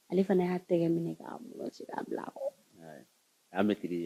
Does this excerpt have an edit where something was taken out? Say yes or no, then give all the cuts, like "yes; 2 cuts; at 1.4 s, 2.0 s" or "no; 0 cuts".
no; 0 cuts